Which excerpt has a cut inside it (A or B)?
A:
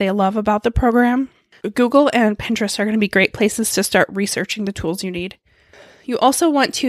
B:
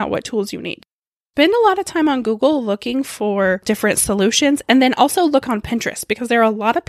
B